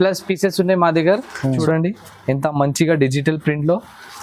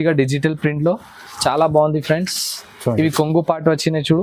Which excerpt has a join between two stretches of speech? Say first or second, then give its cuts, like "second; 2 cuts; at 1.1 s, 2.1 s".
first; 1 cut; at 1.6 s